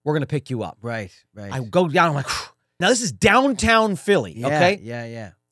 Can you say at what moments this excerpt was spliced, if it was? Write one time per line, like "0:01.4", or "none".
0:02.8